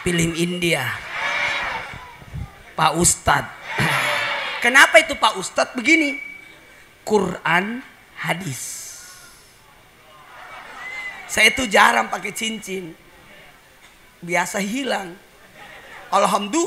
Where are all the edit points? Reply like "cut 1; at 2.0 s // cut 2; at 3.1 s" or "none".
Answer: cut 1; at 10.5 s